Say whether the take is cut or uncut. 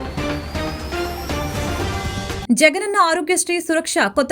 uncut